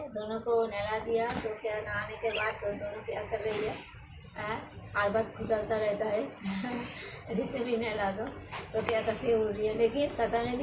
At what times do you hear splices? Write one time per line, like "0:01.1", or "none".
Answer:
none